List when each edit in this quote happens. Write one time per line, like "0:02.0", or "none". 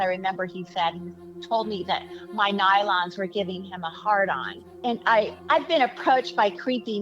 0:04.7